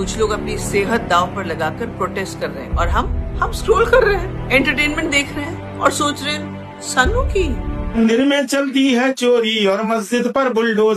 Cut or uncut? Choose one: cut